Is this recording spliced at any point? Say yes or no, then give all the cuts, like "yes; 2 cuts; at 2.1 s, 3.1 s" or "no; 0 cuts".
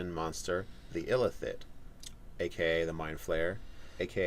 yes; 1 cut; at 2.4 s